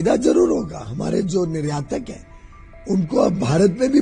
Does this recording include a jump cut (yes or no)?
no